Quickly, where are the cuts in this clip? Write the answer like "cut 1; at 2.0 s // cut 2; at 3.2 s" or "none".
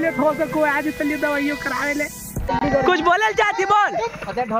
cut 1; at 2.5 s